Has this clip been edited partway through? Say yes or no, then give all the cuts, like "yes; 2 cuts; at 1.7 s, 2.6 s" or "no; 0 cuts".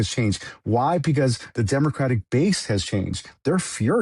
no; 0 cuts